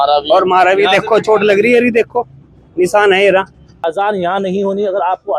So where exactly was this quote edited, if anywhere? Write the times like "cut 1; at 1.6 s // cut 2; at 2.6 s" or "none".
cut 1; at 3.8 s